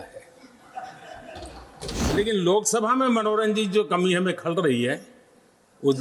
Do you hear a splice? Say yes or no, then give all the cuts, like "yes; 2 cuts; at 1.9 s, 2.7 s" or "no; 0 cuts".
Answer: yes; 1 cut; at 2.1 s